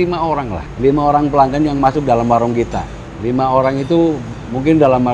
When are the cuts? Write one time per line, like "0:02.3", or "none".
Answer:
none

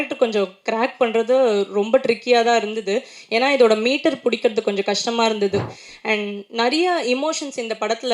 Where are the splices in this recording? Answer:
0:05.7

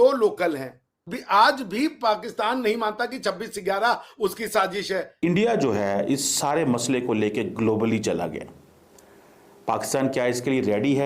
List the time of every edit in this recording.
0:01.1
0:05.1

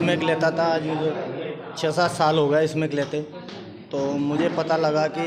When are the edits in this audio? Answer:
none

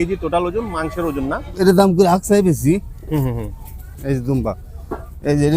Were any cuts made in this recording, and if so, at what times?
0:01.5

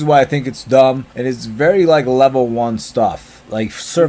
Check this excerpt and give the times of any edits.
0:01.1

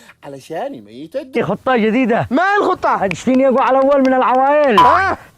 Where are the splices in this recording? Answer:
0:01.4

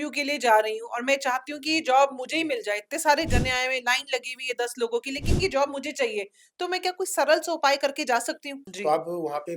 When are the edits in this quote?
0:08.7

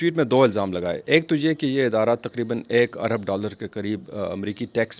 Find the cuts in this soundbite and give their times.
none

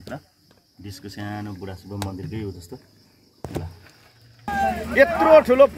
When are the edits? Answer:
0:04.5

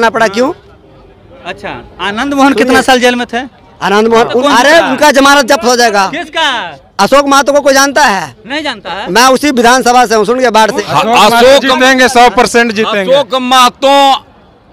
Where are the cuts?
0:04.4
0:10.8

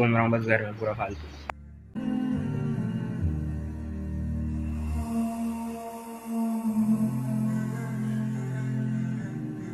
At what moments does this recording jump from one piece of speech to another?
none

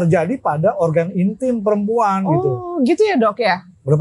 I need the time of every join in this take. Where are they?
none

